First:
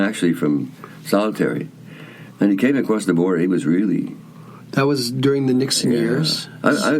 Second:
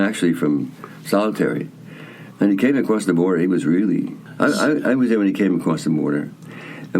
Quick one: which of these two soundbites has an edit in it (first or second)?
second